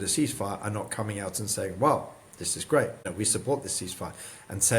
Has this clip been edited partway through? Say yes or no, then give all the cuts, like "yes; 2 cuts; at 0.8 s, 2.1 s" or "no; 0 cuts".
yes; 1 cut; at 3.0 s